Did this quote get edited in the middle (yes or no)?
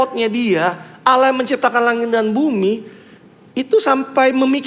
no